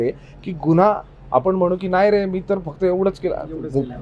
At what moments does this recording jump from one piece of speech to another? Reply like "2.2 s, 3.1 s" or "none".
none